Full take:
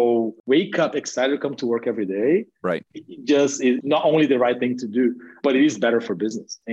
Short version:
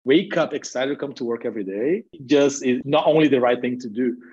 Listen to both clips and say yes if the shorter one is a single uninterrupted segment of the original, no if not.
no